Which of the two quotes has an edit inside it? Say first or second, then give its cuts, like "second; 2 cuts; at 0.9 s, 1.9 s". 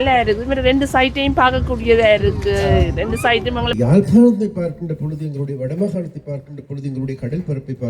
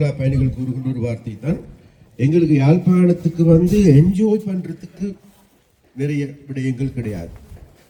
first; 1 cut; at 3.7 s